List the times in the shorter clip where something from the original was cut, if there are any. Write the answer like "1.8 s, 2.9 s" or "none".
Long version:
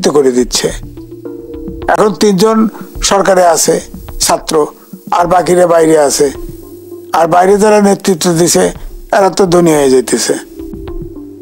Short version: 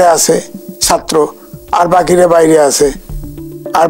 none